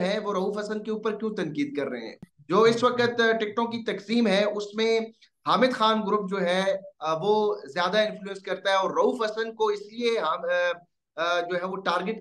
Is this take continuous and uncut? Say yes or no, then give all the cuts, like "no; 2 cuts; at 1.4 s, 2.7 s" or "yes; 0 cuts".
no; 1 cut; at 2.1 s